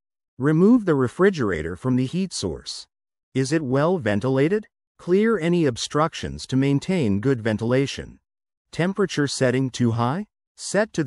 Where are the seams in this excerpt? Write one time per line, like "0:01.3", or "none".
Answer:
none